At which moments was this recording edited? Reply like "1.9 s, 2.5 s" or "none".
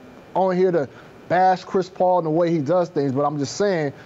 none